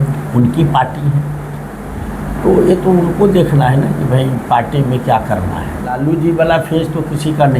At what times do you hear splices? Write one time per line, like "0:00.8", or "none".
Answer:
0:06.0